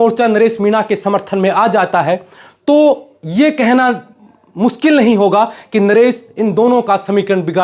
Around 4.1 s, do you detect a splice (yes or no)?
no